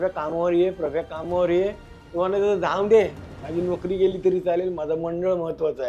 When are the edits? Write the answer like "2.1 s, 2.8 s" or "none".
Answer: none